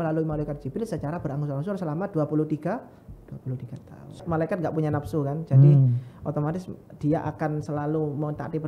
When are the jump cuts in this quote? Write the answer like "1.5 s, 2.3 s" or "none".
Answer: 4.2 s